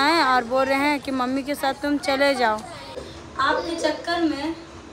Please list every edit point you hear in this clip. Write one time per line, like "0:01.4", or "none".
0:03.0